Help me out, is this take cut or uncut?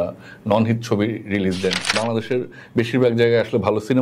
cut